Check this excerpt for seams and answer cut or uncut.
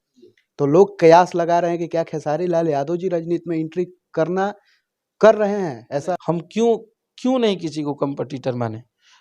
cut